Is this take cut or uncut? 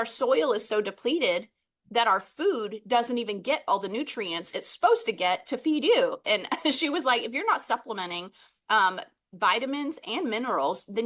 uncut